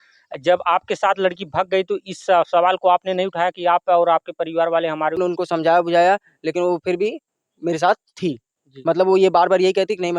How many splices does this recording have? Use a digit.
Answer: 1